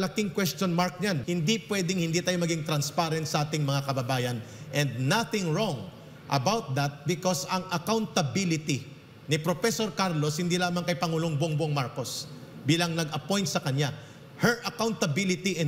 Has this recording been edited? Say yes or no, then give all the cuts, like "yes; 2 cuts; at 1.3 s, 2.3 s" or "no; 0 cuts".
yes; 1 cut; at 1.2 s